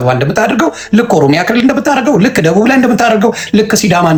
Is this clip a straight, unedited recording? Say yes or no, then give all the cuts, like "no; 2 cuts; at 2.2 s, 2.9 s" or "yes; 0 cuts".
yes; 0 cuts